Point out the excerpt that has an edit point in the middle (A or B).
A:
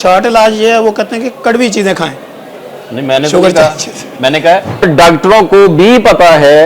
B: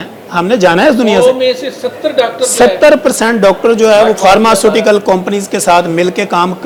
A